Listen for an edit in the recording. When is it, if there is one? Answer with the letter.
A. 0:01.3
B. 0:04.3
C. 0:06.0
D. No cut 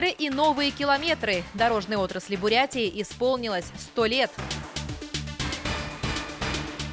B